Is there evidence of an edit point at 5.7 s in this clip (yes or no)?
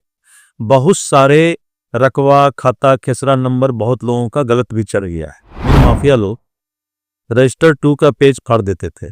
yes